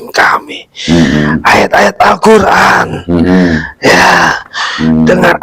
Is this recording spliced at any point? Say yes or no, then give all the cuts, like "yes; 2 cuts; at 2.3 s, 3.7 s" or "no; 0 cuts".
no; 0 cuts